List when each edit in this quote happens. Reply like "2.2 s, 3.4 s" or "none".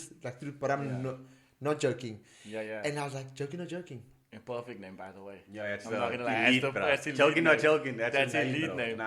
none